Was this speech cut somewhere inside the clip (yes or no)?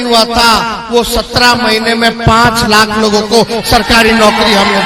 no